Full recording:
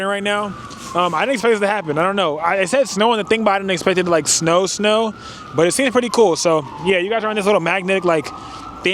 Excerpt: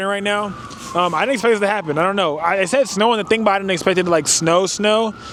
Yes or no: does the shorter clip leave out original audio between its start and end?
no